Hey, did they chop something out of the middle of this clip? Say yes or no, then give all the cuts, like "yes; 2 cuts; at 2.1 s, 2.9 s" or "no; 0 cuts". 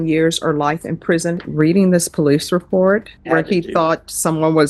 yes; 2 cuts; at 1.5 s, 3.1 s